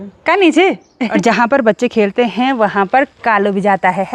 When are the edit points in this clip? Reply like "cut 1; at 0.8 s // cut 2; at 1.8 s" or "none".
cut 1; at 1.1 s